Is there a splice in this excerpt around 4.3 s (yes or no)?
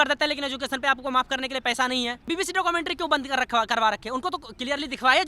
no